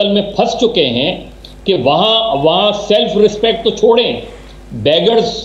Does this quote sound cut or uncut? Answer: uncut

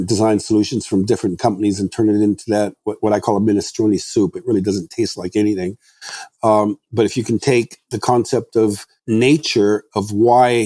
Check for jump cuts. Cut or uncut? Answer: cut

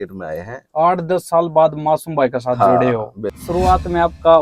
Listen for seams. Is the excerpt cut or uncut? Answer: cut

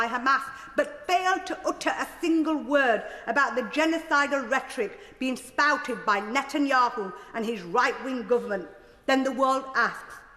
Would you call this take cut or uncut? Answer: uncut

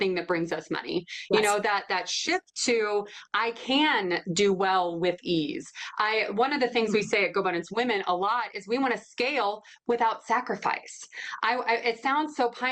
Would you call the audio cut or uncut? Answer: uncut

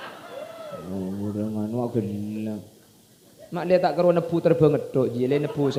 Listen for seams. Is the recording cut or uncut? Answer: uncut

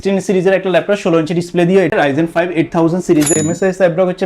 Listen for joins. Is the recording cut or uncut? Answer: cut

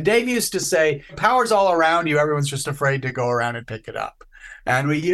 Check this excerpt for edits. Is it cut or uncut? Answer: uncut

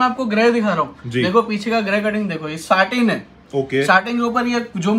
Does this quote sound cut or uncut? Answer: uncut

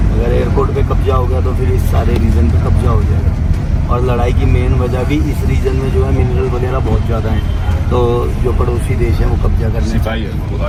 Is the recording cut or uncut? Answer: uncut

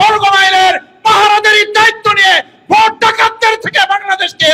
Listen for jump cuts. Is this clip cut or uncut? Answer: uncut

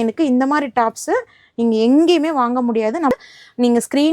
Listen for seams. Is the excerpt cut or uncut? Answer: cut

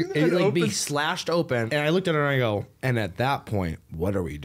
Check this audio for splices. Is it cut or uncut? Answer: cut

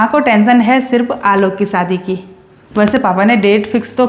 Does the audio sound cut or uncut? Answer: uncut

